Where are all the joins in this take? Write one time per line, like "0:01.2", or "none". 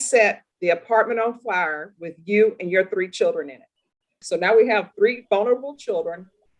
0:04.2